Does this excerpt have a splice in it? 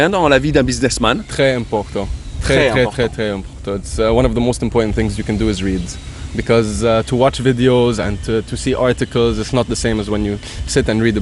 no; 0 cuts

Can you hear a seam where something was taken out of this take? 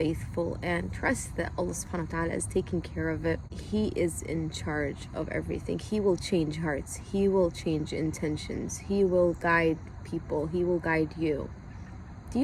yes; 1 cut; at 3.5 s

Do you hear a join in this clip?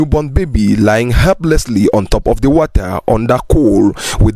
no; 0 cuts

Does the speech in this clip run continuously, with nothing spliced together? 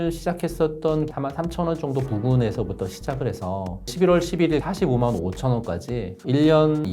no; 2 cuts; at 1.1 s, 3.9 s

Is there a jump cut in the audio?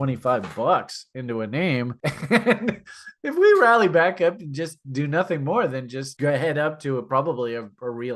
no; 0 cuts

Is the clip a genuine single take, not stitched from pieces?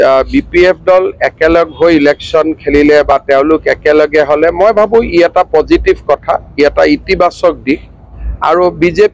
yes; 0 cuts

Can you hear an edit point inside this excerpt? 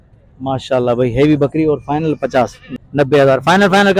yes; 1 cut; at 2.6 s

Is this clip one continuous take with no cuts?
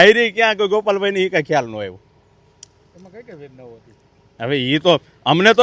yes; 0 cuts

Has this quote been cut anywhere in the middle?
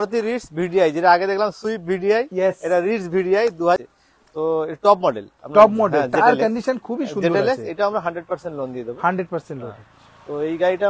yes; 1 cut; at 3.8 s

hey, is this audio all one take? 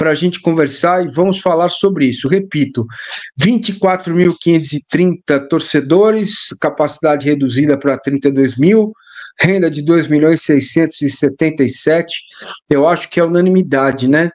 yes; 0 cuts

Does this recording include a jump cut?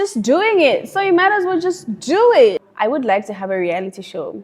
yes; 1 cut; at 2.6 s

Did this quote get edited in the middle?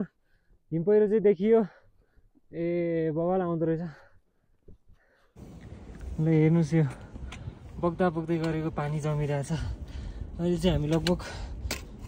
yes; 1 cut; at 5.4 s

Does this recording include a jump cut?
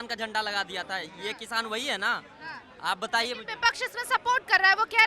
no; 0 cuts

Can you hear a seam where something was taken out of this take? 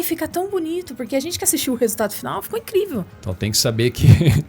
yes; 1 cut; at 3.2 s

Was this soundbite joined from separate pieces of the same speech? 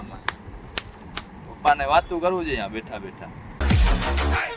yes; 1 cut; at 3.4 s

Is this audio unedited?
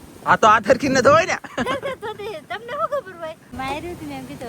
no; 1 cut; at 3.5 s

